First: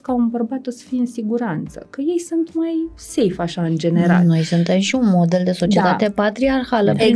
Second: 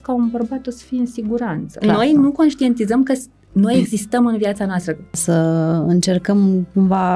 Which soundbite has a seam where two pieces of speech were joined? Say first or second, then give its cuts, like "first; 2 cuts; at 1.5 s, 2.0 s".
second; 2 cuts; at 1.7 s, 5.2 s